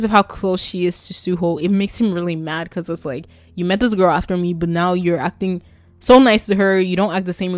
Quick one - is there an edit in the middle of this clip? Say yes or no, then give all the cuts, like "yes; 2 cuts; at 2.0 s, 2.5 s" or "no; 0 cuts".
no; 0 cuts